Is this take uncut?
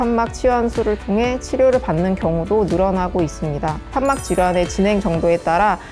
no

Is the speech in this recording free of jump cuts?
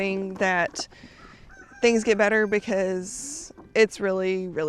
yes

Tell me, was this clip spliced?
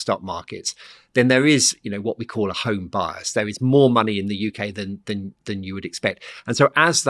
no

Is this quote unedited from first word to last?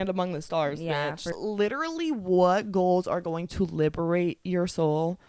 no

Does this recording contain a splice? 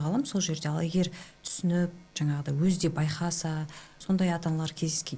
yes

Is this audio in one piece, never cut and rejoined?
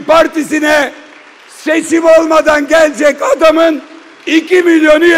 yes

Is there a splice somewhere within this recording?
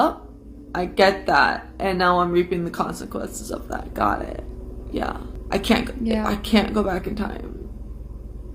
yes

